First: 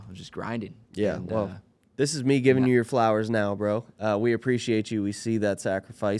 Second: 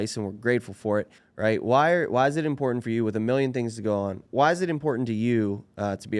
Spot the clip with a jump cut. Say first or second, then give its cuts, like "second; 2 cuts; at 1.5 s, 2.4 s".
second; 2 cuts; at 1.2 s, 4.2 s